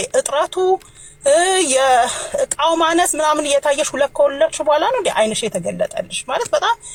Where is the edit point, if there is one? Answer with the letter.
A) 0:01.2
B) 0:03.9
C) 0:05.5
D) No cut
D